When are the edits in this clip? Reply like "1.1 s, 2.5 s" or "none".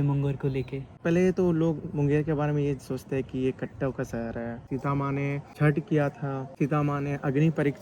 5.1 s, 6.5 s